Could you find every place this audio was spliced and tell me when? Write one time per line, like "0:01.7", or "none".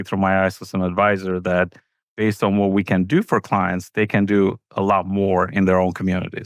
none